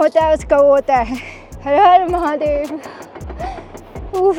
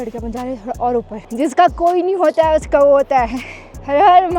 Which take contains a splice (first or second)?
second